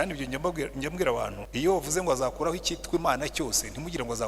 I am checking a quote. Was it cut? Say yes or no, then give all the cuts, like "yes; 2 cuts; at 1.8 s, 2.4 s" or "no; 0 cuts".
yes; 1 cut; at 1.4 s